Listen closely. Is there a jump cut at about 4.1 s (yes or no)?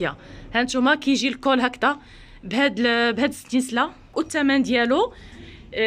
yes